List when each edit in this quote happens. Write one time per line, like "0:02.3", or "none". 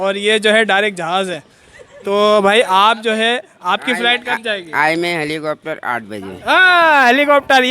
0:01.8
0:06.5